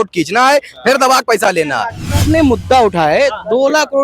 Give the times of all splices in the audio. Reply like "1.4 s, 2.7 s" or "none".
2.2 s